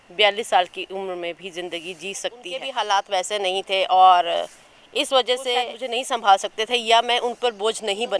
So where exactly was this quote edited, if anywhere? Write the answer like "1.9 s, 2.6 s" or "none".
2.6 s, 5.8 s

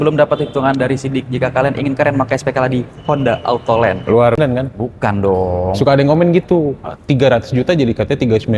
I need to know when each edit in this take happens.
4.4 s

